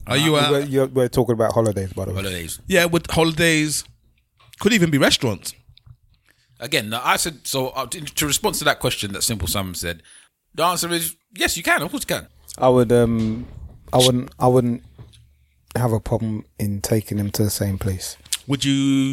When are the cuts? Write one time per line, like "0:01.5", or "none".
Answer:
0:10.2
0:12.3